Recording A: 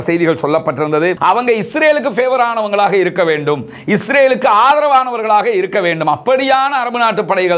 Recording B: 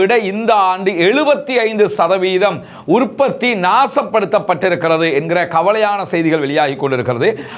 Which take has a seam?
A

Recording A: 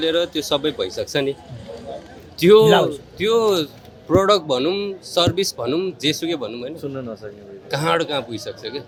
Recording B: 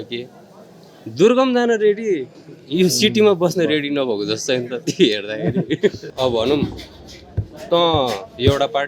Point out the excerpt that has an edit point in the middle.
B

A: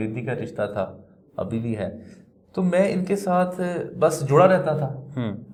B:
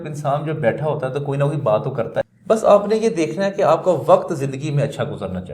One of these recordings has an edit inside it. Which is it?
B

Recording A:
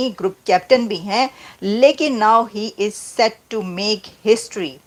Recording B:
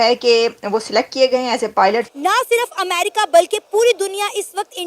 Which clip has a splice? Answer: B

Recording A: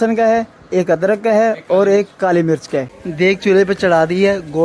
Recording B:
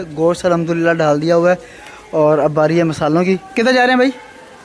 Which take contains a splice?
A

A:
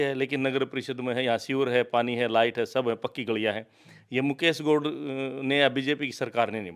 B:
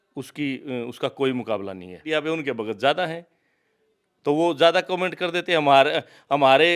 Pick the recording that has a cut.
B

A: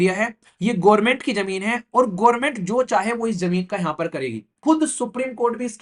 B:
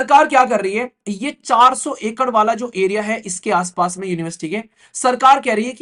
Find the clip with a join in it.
A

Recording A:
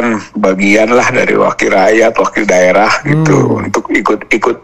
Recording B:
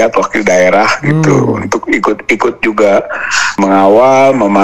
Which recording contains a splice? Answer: B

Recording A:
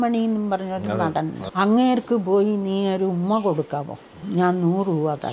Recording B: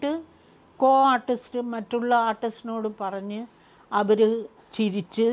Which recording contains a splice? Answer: A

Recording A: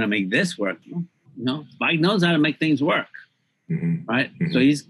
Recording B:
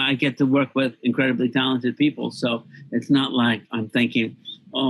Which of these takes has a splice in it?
A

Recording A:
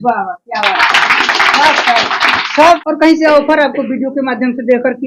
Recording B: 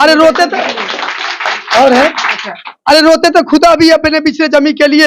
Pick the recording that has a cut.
A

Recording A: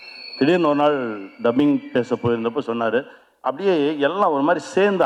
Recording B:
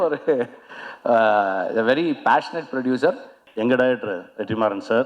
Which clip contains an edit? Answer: B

